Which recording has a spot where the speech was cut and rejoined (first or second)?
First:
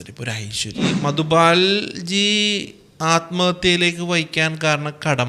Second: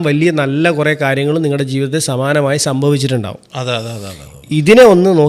first